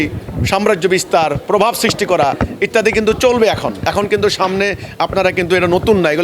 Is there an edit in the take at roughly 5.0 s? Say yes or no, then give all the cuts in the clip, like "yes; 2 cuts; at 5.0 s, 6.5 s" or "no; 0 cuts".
no; 1 cut; at 1.4 s